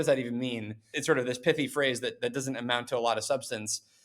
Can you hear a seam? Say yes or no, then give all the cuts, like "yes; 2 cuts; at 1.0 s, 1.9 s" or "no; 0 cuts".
yes; 1 cut; at 0.9 s